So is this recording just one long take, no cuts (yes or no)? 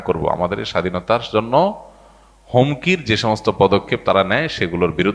yes